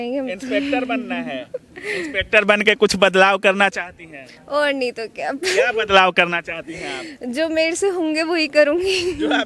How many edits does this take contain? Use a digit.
0